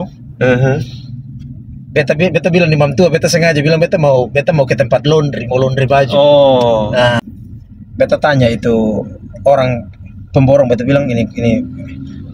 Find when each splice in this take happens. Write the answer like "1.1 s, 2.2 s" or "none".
7.2 s